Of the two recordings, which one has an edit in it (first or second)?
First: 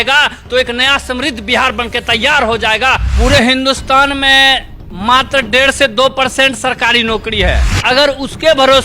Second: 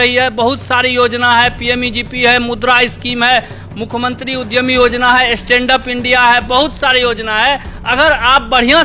first